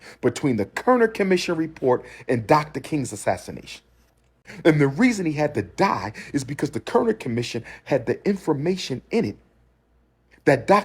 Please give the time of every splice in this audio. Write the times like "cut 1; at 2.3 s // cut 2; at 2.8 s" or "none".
cut 1; at 4.4 s